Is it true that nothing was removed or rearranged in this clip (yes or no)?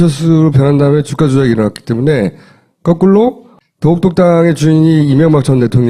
no